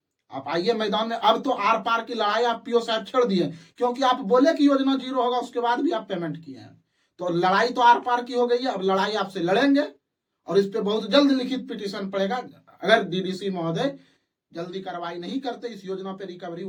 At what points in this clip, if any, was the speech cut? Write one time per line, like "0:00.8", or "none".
none

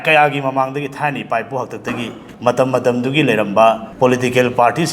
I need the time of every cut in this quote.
0:02.2
0:03.9

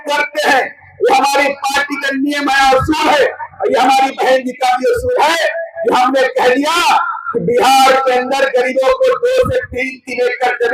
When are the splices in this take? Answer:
none

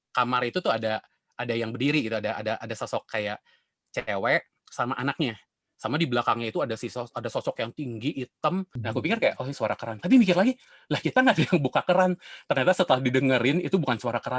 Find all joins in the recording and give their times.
0:08.8

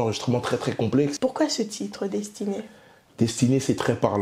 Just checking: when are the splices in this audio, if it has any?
0:01.1

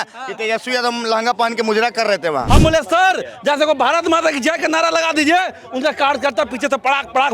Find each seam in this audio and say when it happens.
0:02.4

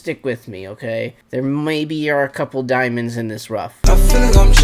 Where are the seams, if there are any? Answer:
0:01.2
0:03.7

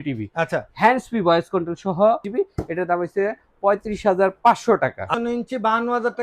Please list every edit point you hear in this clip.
0:02.3
0:05.1

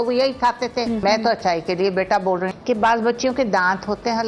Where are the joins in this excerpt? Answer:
0:01.0
0:02.5

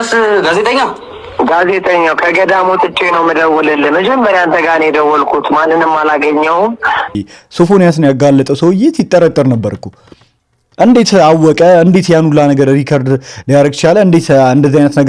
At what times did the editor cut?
0:01.3
0:07.4

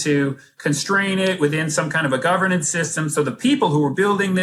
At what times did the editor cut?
none

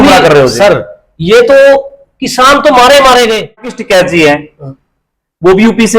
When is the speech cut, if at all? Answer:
0:03.8

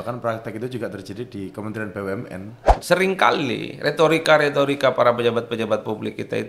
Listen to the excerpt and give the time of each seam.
0:02.8

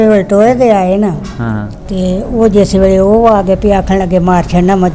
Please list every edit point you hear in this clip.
0:01.8

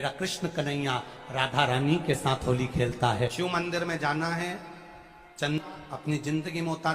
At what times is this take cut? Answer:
0:03.3
0:05.6

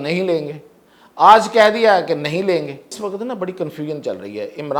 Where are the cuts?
0:02.9

